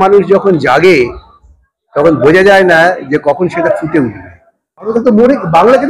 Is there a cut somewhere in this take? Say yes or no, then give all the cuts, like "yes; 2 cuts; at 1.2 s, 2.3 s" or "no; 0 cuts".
yes; 1 cut; at 4.9 s